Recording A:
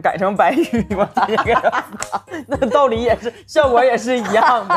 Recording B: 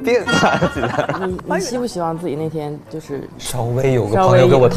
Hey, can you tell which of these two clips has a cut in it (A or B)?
B